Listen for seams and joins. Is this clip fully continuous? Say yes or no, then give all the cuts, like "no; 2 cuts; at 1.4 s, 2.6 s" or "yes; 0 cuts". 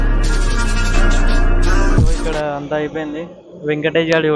no; 1 cut; at 2.4 s